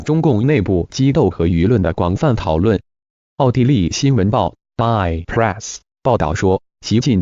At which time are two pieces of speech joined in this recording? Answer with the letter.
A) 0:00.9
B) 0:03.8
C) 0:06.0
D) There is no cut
D